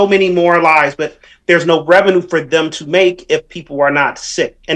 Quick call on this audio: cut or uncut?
uncut